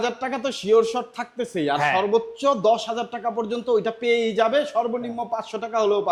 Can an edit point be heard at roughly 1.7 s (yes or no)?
no